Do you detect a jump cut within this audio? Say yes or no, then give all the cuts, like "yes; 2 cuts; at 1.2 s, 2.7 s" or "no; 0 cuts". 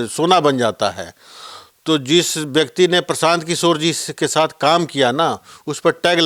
no; 0 cuts